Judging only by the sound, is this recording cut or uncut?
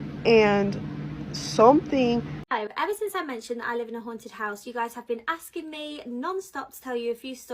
cut